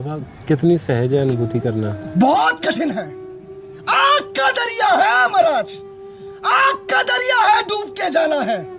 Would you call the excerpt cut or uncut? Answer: uncut